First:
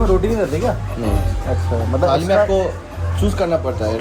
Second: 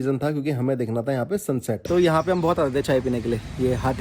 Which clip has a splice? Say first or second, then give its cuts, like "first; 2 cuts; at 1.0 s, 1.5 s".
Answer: second; 1 cut; at 1.8 s